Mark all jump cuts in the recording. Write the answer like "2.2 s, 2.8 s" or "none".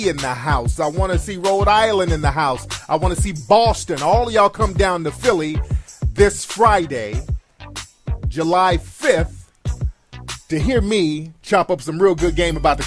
none